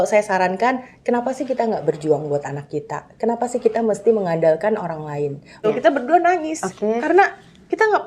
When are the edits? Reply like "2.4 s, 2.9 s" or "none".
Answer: 5.6 s